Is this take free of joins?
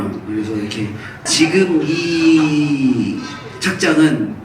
no; 1 cut; at 1.1 s

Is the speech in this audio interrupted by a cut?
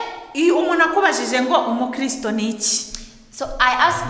no; 0 cuts

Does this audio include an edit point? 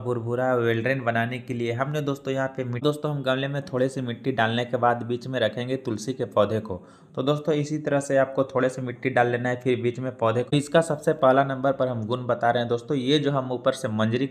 yes; 2 cuts; at 2.8 s, 10.5 s

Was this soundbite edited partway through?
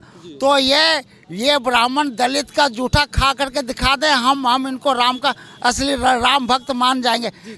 no; 0 cuts

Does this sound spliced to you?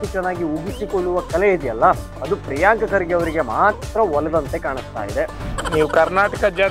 no; 0 cuts

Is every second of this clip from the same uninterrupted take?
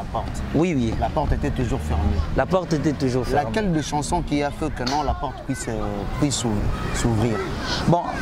yes; 0 cuts

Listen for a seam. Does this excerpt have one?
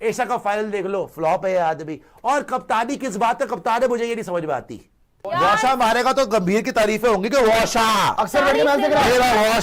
yes; 1 cut; at 5.1 s

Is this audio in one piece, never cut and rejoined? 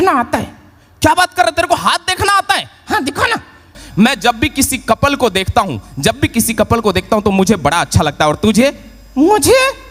no; 1 cut; at 3.7 s

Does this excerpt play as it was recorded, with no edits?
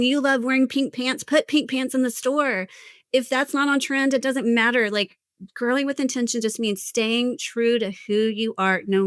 yes; 0 cuts

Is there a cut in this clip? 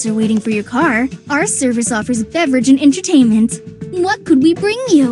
no; 0 cuts

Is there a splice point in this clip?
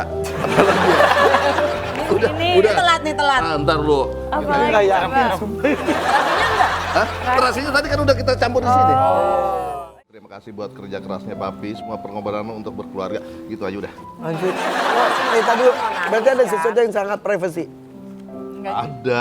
yes; 1 cut; at 9.8 s

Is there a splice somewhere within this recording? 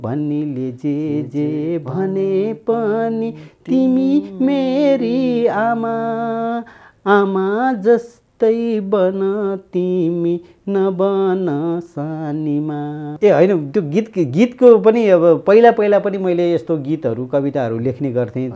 yes; 1 cut; at 13.1 s

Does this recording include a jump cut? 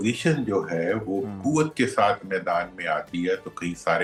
no; 0 cuts

